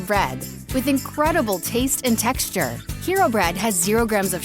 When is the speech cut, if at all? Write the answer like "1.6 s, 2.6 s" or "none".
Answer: none